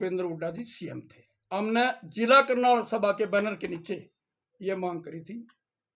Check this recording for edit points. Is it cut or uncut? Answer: uncut